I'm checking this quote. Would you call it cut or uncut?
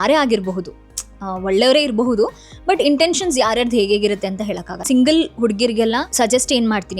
cut